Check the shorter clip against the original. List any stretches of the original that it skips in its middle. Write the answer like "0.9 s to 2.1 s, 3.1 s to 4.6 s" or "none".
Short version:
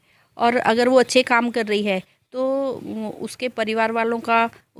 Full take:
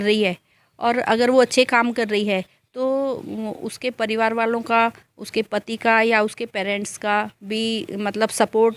none